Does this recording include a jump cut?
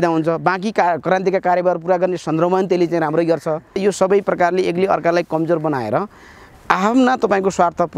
yes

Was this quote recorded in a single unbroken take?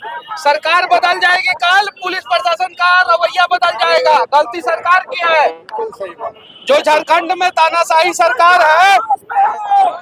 yes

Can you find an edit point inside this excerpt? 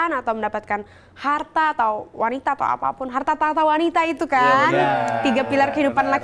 no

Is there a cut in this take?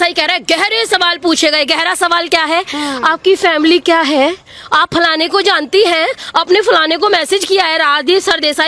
no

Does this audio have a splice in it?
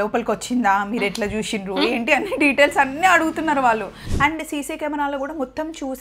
yes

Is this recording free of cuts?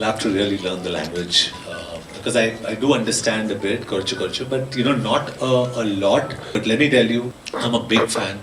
no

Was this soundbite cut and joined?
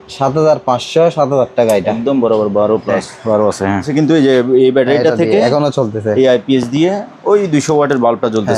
yes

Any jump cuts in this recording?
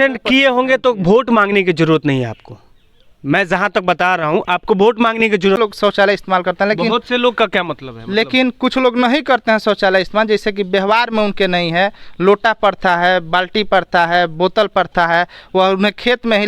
yes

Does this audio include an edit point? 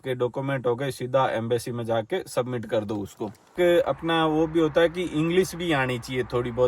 yes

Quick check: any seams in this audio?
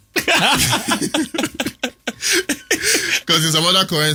no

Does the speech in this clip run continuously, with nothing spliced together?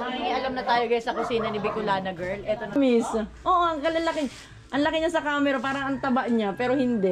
no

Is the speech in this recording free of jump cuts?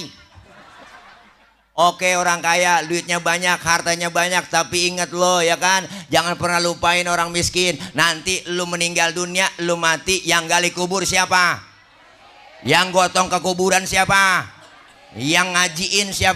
no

